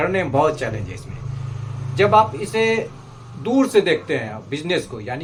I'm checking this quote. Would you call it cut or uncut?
uncut